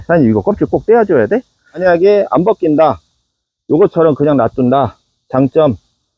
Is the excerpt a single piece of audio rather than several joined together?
no; 1 cut; at 1.8 s

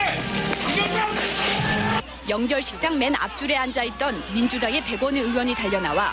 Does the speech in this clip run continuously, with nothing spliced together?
no; 1 cut; at 4.9 s

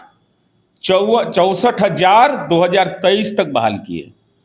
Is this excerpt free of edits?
yes; 0 cuts

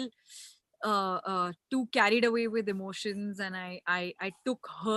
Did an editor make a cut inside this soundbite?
no; 0 cuts

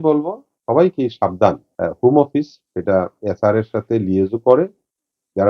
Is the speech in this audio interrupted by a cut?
yes; 1 cut; at 1.7 s

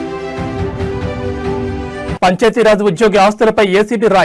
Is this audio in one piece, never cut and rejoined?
yes; 0 cuts

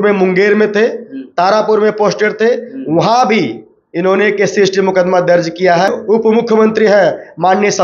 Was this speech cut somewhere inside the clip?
yes; 1 cut; at 6.0 s

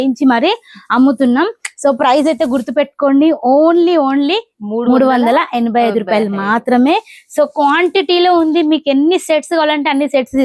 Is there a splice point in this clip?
no; 0 cuts

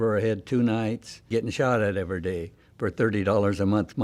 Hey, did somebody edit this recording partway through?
yes; 1 cut; at 1.3 s

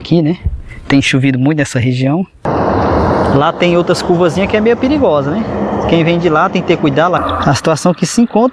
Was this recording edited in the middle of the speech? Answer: yes; 2 cuts; at 2.5 s, 7.2 s

